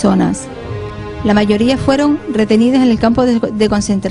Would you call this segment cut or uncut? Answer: uncut